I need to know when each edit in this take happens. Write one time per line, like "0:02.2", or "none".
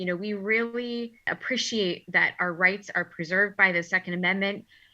0:01.4